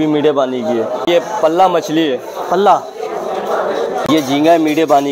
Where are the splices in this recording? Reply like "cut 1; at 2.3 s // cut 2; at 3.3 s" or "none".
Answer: cut 1; at 1.1 s // cut 2; at 4.0 s